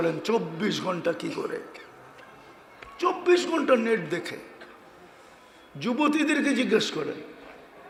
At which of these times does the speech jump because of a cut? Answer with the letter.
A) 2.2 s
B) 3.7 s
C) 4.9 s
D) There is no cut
D